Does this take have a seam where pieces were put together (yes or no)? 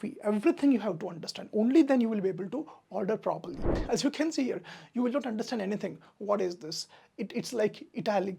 yes